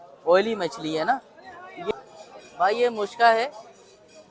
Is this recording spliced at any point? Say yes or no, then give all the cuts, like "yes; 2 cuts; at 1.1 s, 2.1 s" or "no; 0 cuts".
yes; 1 cut; at 1.9 s